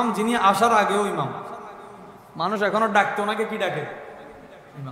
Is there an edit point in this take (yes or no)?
no